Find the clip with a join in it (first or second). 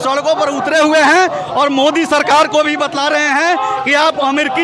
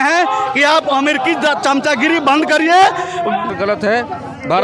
second